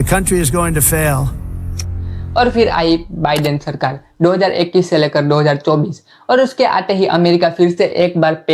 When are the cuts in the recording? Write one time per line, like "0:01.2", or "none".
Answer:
none